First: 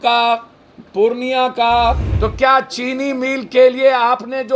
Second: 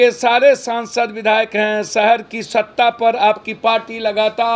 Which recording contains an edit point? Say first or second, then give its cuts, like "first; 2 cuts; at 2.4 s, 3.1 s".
first; 1 cut; at 2.1 s